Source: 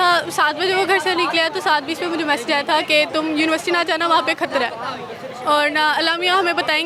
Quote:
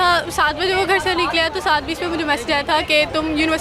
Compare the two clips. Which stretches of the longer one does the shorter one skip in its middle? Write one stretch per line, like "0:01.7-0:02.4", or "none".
none